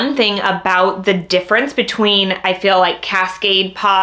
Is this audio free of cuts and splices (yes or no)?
yes